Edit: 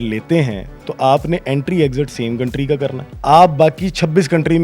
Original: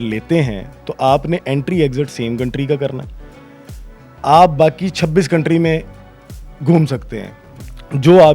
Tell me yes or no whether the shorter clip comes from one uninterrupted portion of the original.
no